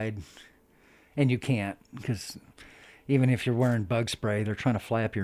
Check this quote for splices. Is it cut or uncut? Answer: uncut